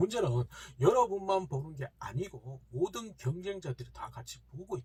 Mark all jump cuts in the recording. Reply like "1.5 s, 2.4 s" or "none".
none